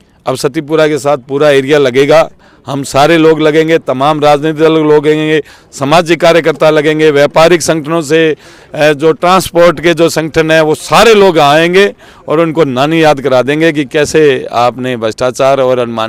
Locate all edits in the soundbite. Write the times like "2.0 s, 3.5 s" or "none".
none